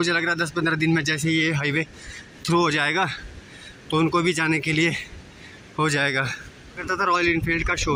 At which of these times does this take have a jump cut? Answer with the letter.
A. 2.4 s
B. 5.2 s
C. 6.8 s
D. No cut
C